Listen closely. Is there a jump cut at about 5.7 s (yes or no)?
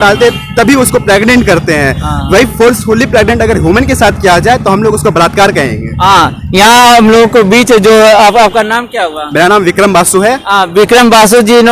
no